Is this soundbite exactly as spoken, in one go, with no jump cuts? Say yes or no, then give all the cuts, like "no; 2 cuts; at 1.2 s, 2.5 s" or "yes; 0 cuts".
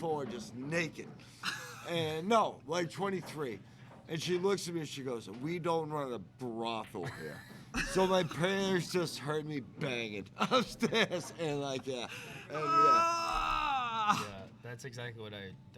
yes; 0 cuts